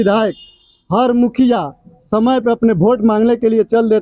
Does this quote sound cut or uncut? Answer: uncut